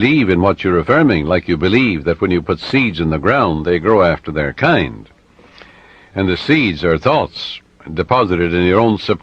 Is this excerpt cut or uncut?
cut